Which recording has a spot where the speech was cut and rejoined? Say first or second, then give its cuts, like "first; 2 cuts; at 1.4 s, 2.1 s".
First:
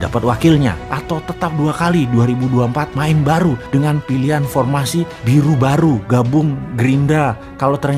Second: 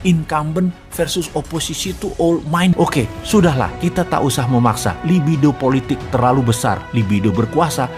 second; 1 cut; at 2.8 s